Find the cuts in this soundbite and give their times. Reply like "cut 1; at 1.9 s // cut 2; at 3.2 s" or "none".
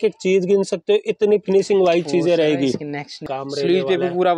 cut 1; at 3.2 s